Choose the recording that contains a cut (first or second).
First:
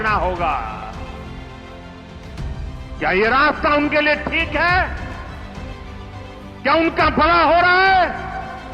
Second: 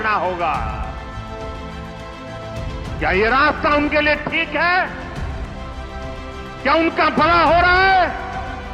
first